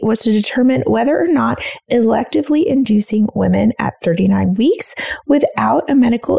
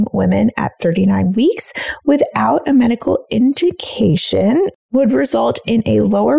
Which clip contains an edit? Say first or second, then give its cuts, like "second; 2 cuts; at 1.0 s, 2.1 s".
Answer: second; 1 cut; at 4.8 s